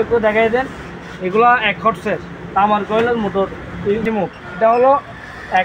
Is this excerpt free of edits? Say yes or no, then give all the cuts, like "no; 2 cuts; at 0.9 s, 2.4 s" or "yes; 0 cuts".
no; 1 cut; at 4.0 s